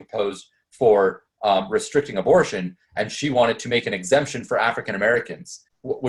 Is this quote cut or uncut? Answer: uncut